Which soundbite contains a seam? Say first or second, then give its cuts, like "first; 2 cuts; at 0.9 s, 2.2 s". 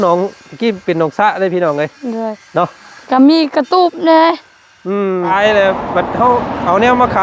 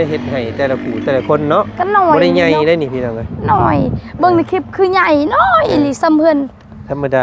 first; 1 cut; at 5.3 s